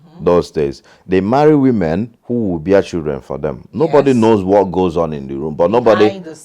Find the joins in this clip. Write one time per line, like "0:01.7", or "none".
0:02.2